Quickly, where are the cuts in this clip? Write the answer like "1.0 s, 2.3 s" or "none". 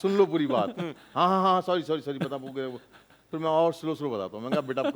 none